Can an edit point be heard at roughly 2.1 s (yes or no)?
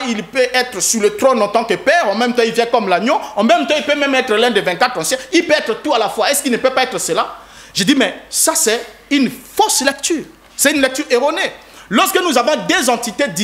no